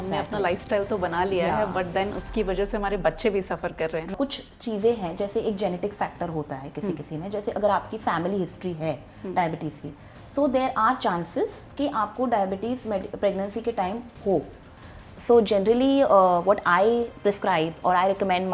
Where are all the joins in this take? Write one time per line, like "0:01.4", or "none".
0:04.1
0:15.1

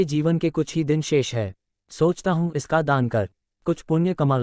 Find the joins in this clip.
0:03.4

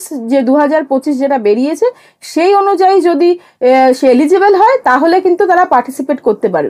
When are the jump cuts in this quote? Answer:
none

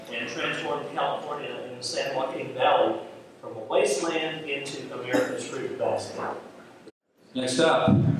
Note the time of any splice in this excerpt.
none

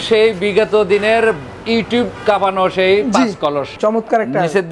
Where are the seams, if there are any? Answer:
0:03.7

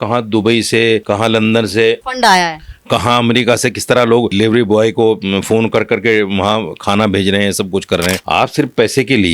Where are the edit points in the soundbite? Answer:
0:01.0
0:02.0
0:04.3
0:08.2

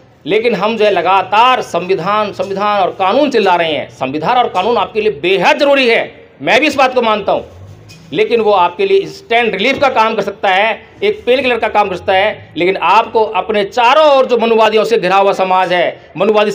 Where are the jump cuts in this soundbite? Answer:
none

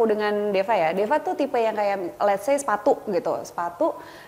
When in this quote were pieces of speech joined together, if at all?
none

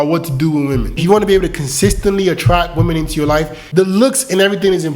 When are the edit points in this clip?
0:01.0
0:03.6

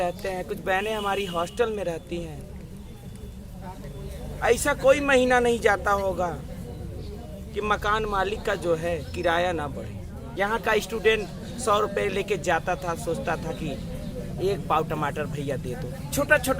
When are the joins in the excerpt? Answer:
0:10.2

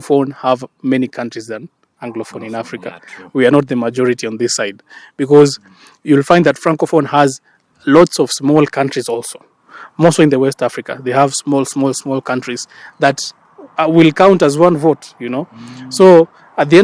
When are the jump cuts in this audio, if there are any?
none

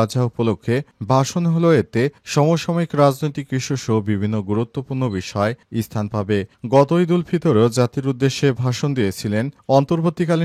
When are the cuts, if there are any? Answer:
none

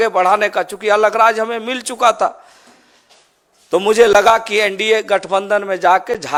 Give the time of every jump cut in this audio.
none

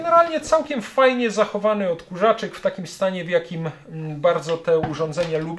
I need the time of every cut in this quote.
none

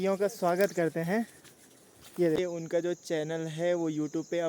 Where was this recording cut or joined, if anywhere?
0:02.4

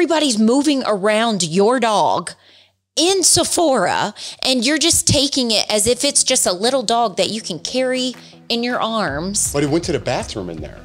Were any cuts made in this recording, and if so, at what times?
none

